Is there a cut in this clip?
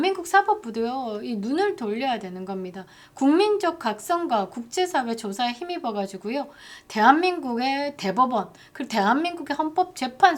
no; 0 cuts

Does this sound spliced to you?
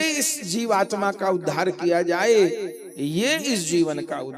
no; 0 cuts

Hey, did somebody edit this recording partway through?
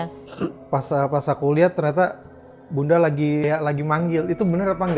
yes; 1 cut; at 3.4 s

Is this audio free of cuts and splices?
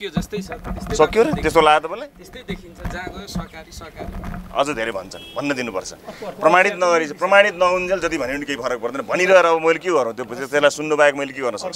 yes; 0 cuts

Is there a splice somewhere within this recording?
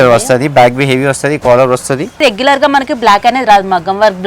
yes; 1 cut; at 2.2 s

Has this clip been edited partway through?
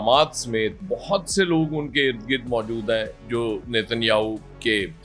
no; 0 cuts

